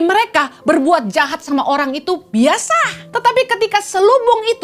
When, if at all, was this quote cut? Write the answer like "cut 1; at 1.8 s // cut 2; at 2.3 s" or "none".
cut 1; at 3.0 s